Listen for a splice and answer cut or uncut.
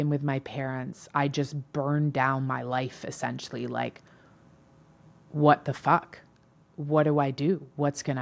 uncut